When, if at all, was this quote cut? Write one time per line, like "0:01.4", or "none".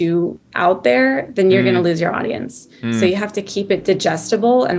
none